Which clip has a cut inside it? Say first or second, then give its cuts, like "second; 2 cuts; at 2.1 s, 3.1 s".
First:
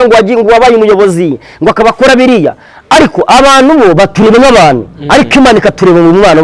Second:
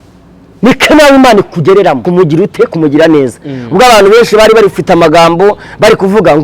second; 1 cut; at 2.1 s